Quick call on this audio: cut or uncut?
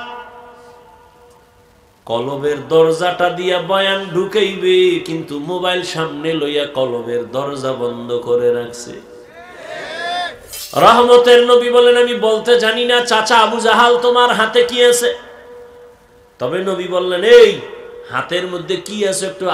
cut